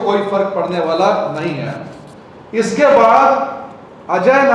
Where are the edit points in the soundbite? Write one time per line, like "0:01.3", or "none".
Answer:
none